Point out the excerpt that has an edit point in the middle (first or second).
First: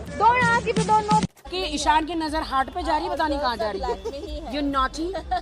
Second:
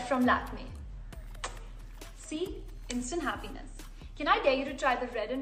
first